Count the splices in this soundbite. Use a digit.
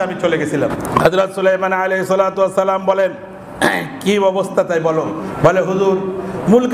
2